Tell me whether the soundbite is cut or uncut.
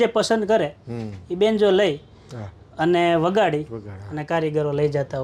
uncut